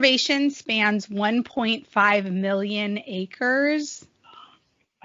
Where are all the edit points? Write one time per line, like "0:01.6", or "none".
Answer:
none